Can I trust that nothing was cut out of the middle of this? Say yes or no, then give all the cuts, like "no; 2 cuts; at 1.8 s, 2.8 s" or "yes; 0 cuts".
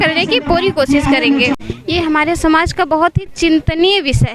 no; 1 cut; at 1.5 s